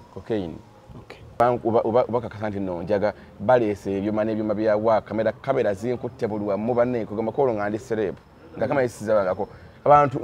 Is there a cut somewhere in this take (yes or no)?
yes